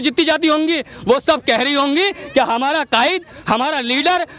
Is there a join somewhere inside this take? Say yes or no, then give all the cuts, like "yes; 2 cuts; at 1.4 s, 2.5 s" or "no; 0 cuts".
no; 0 cuts